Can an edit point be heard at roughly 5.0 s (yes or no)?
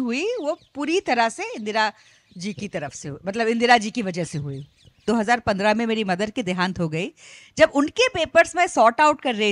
yes